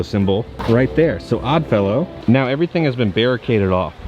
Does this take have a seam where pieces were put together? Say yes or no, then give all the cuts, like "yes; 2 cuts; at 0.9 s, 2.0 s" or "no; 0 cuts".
yes; 1 cut; at 2.2 s